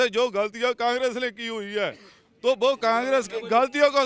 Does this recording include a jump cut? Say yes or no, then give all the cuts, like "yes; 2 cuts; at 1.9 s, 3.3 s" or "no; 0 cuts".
no; 0 cuts